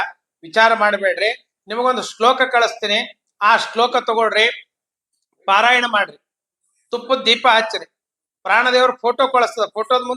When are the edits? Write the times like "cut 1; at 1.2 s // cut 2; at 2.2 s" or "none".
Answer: none